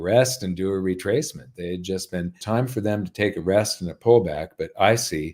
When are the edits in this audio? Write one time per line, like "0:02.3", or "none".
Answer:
0:02.4